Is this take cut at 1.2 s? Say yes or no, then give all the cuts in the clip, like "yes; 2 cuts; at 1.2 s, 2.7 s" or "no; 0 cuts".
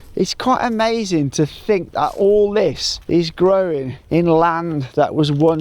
no; 2 cuts; at 2.9 s, 3.9 s